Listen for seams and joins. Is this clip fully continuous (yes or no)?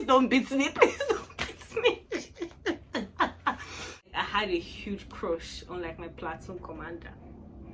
no